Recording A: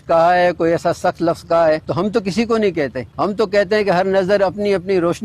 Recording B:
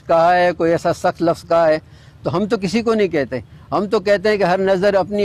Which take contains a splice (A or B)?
A